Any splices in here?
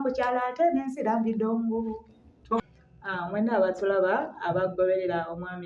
yes; 1 cut; at 2.6 s

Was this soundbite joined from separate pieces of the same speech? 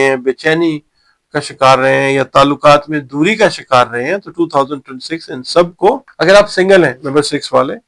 yes; 1 cut; at 6.1 s

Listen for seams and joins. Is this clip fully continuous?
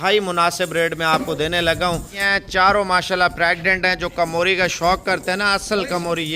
no; 1 cut; at 2.2 s

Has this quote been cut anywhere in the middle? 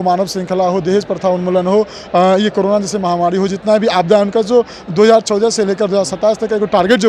no; 0 cuts

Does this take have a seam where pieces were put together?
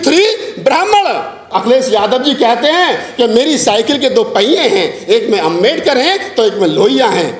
yes; 1 cut; at 1.5 s

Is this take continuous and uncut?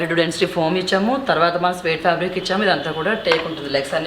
yes; 0 cuts

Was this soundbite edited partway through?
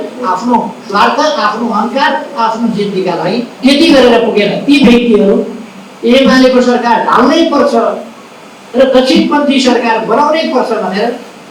yes; 1 cut; at 3.5 s

